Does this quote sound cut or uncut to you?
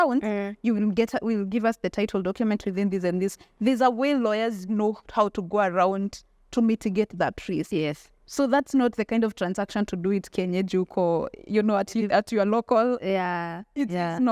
uncut